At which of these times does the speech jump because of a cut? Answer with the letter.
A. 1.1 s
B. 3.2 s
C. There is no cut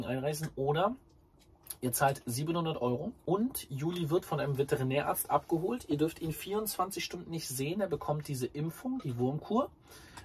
B